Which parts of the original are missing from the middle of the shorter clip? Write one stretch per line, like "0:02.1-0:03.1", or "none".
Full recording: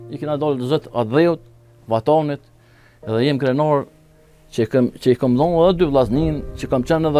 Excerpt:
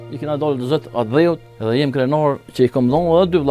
0:01.5-0:03.0
0:04.0-0:05.0